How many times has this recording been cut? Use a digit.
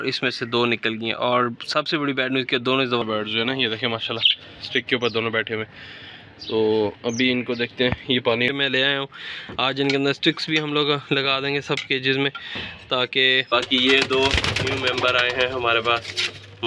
3